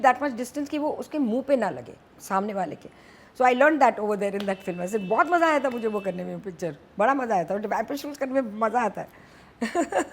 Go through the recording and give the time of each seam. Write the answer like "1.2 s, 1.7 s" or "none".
none